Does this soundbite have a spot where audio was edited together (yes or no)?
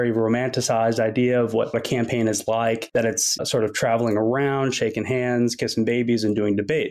yes